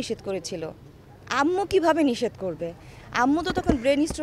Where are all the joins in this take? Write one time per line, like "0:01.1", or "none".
none